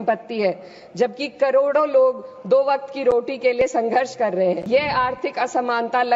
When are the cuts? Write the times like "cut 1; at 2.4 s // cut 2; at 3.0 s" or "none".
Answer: cut 1; at 4.6 s